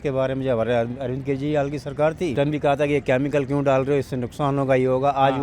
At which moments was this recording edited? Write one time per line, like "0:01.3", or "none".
0:02.3